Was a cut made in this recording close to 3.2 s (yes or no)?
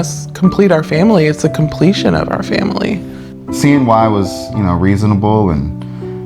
yes